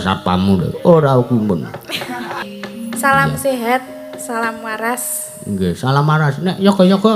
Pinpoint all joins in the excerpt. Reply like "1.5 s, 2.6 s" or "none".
2.5 s